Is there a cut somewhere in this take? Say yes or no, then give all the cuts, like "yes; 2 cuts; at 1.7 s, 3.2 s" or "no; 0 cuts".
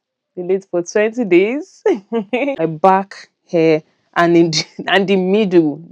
yes; 1 cut; at 2.5 s